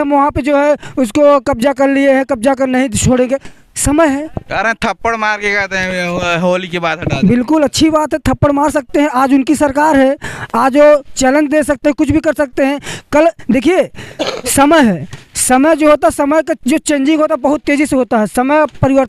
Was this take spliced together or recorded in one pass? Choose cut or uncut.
uncut